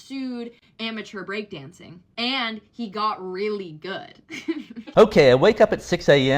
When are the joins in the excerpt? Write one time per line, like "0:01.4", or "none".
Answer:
0:04.9